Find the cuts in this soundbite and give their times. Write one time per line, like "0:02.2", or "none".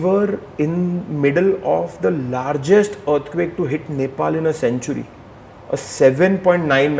none